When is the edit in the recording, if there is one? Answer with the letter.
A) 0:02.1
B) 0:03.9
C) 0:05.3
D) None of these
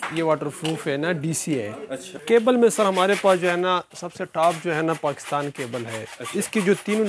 A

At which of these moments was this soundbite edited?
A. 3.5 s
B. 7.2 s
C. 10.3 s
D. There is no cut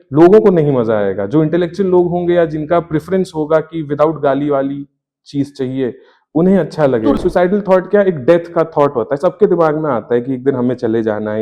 B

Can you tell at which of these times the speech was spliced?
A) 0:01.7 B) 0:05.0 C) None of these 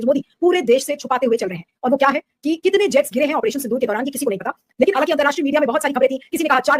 B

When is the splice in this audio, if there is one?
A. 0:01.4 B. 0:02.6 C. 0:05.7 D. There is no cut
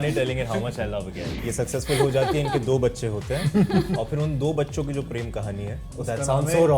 A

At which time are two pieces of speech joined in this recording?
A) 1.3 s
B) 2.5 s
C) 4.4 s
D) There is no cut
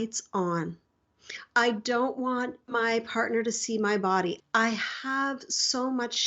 C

